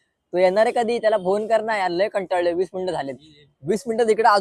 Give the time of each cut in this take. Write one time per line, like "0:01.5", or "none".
none